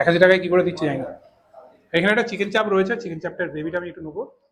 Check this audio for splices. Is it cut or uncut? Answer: uncut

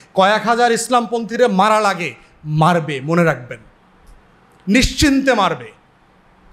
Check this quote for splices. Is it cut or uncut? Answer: uncut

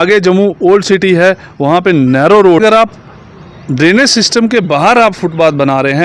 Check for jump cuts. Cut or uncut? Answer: cut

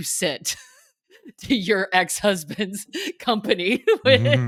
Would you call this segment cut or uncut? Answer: uncut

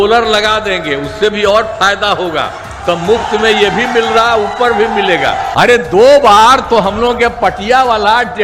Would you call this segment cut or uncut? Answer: cut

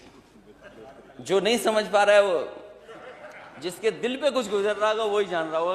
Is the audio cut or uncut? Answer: uncut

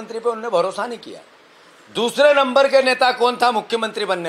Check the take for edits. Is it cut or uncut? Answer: uncut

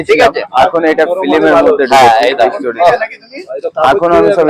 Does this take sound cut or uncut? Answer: uncut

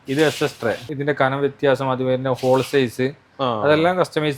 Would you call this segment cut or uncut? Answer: cut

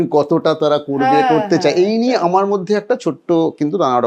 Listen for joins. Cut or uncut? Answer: uncut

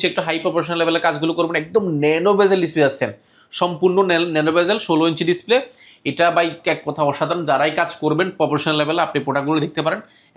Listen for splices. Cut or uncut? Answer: uncut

